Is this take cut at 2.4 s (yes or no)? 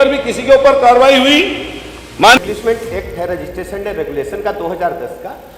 yes